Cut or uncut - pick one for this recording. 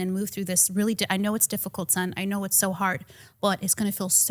uncut